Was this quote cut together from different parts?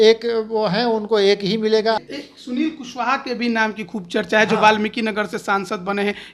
yes; 1 cut; at 2.0 s

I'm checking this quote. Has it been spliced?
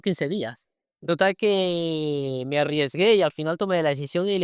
yes; 1 cut; at 1.0 s

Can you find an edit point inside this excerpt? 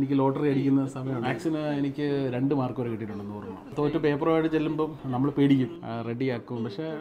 yes; 4 cuts; at 1.1 s, 3.7 s, 5.0 s, 5.8 s

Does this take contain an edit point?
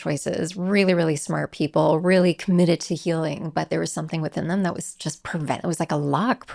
no; 0 cuts

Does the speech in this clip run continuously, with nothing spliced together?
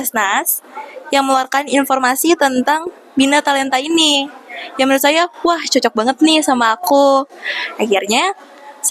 yes; 0 cuts

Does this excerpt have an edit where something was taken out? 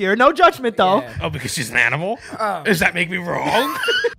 no; 0 cuts

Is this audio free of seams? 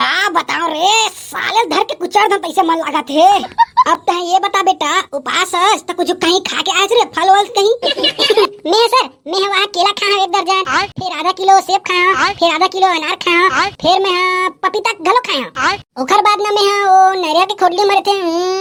yes; 0 cuts

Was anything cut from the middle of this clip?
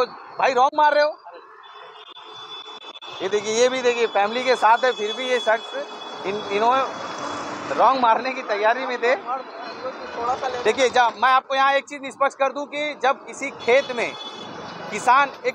no; 0 cuts

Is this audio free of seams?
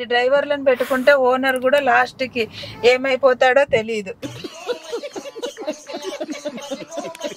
yes; 0 cuts

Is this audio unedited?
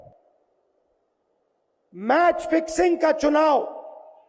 yes; 0 cuts

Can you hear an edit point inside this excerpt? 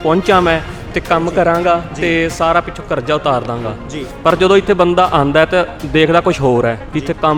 no; 0 cuts

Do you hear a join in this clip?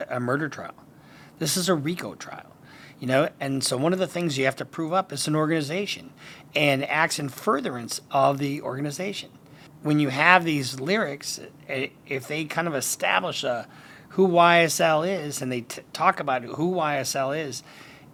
no; 0 cuts

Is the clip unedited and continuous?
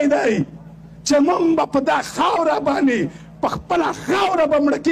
yes; 0 cuts

